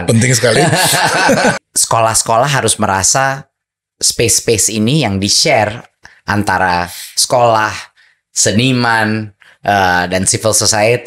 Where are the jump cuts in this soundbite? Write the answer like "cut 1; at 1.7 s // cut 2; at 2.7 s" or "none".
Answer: cut 1; at 1.6 s